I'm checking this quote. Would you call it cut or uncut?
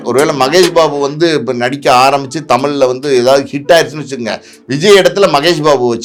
uncut